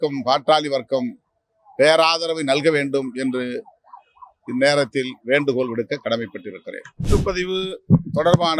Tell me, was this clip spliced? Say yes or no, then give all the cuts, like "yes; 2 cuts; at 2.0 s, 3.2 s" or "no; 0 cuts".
yes; 1 cut; at 7.1 s